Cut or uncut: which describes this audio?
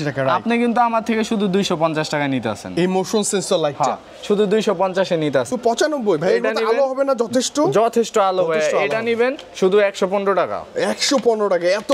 cut